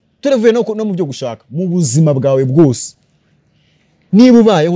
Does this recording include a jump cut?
no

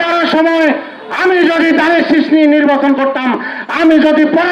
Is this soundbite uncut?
yes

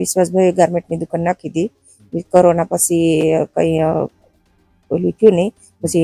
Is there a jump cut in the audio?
no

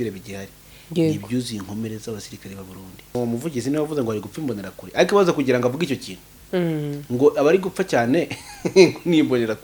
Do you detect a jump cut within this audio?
yes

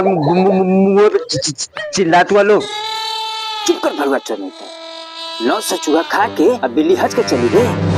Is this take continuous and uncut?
yes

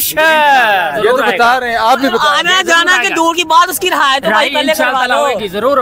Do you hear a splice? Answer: no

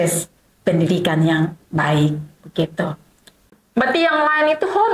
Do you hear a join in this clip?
yes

